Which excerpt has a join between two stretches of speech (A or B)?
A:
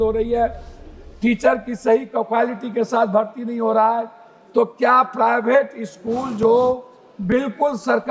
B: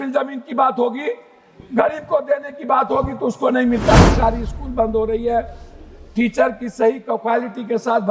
B